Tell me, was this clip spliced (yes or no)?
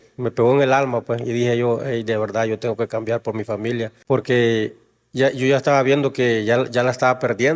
yes